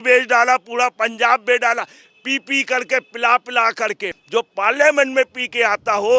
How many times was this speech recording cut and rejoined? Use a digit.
1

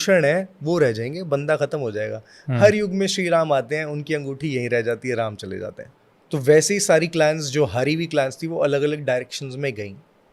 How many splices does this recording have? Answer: 1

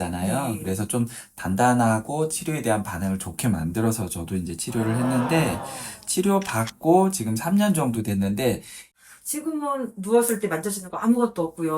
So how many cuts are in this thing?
1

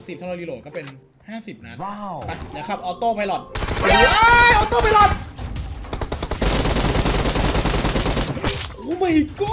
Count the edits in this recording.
0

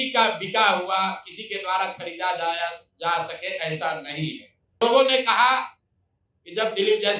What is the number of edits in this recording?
1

